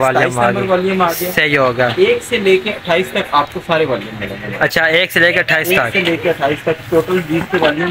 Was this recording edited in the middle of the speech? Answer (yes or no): no